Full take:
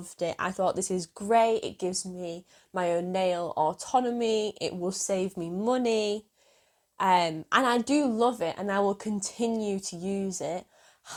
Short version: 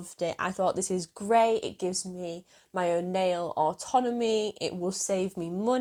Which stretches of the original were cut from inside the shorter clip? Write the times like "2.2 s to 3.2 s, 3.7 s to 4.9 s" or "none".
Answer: none